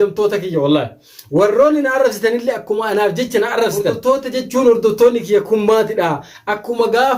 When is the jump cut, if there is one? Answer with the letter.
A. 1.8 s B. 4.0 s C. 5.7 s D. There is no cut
B